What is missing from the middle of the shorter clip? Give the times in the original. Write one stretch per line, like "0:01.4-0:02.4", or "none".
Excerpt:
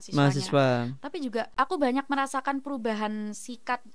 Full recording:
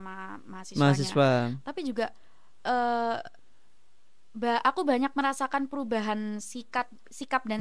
0:02.2-0:04.6